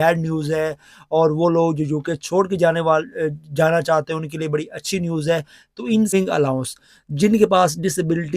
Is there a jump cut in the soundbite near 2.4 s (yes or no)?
no